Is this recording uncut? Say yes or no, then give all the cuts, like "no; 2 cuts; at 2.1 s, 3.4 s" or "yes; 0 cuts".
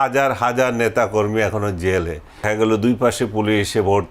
no; 1 cut; at 2.4 s